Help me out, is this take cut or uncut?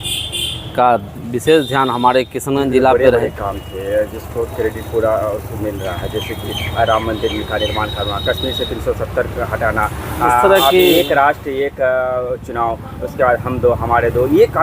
cut